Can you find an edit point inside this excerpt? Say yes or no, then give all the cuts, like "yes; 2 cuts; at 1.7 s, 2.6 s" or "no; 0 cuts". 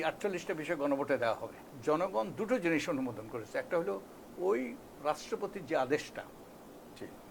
yes; 1 cut; at 1.7 s